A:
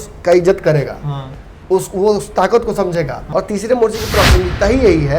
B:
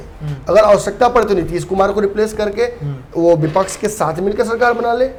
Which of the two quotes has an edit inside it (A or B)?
A